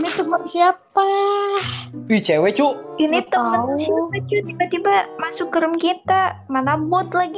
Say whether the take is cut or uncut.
uncut